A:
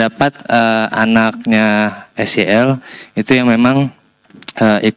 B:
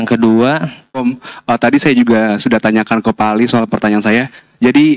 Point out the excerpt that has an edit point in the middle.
B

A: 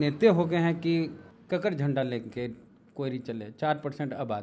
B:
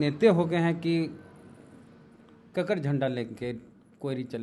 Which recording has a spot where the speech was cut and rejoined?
A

